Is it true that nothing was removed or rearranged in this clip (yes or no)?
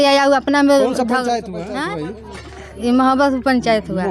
no